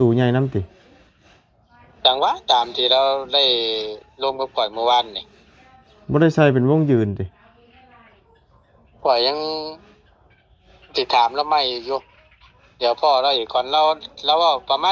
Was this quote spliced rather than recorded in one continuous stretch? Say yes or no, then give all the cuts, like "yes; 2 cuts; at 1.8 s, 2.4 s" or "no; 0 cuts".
no; 0 cuts